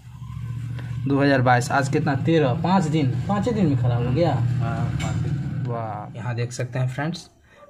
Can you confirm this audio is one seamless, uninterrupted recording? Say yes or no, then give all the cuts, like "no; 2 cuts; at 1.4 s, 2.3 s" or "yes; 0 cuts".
no; 1 cut; at 6.1 s